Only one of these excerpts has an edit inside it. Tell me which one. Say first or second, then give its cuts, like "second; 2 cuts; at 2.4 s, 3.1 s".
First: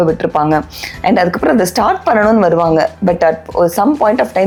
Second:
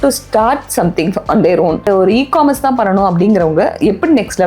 second; 1 cut; at 1.8 s